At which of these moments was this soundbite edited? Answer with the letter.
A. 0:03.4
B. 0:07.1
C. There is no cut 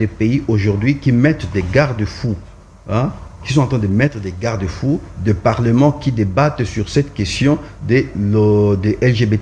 C